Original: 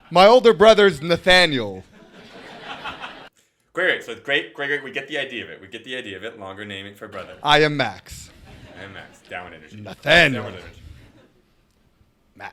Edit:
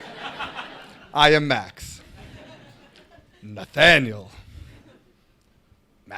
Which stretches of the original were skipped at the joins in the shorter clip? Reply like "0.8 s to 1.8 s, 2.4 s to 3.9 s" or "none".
3.5 s to 7.3 s

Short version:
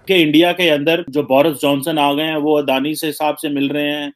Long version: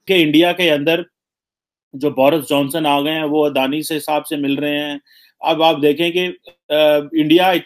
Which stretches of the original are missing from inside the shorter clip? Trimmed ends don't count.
1.1 s to 1.9 s

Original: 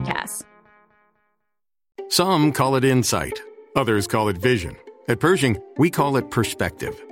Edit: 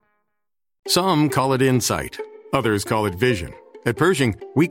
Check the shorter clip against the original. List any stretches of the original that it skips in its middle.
2.1 s to 2.2 s

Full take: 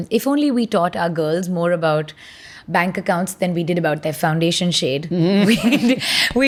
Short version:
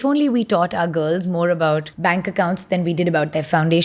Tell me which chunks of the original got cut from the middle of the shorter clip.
2.1 s to 2.6 s

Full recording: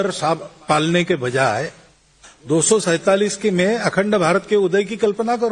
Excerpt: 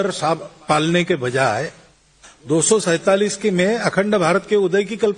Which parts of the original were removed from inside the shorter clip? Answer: none

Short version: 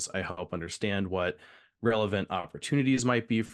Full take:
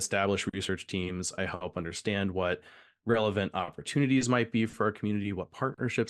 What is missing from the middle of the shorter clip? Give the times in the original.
none

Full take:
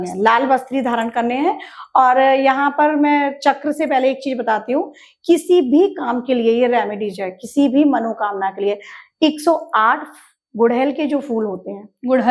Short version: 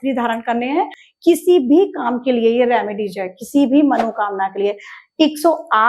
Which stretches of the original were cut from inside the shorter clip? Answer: 1.7 s to 5.1 s

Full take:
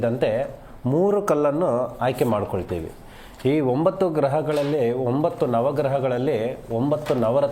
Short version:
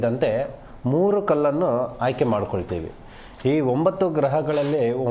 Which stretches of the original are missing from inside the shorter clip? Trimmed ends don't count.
none

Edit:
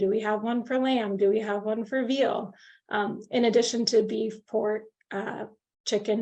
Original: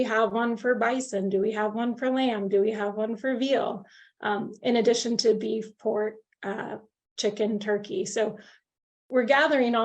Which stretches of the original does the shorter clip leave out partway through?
none

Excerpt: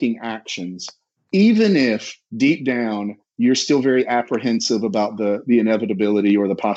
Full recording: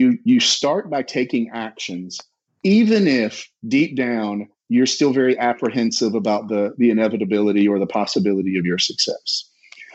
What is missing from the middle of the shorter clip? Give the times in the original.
none

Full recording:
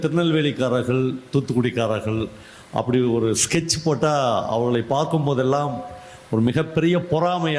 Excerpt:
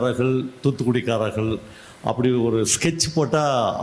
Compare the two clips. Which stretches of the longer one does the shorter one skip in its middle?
none

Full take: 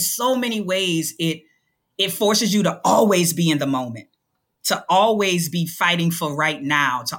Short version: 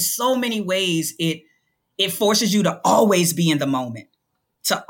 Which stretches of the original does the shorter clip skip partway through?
none

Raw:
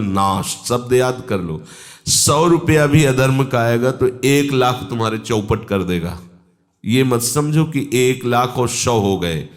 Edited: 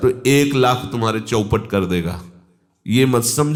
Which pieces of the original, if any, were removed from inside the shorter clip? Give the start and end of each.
none

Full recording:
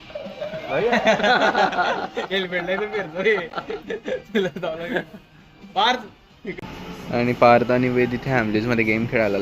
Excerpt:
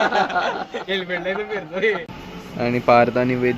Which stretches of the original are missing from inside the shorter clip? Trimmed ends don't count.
3.6 s to 6.7 s

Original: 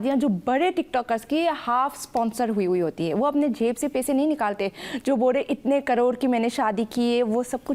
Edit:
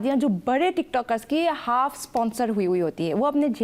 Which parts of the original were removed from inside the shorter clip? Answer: none

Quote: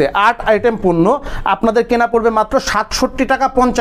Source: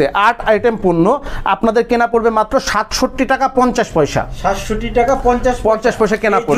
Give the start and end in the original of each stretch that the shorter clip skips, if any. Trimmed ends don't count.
none

